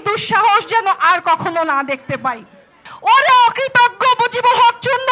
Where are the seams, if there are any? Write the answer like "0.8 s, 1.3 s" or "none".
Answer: 2.9 s